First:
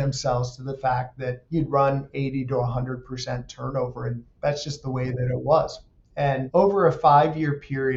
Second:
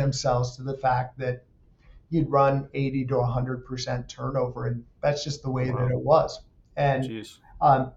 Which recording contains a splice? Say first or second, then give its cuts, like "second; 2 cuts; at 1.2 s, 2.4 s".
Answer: first; 2 cuts; at 1.4 s, 6.4 s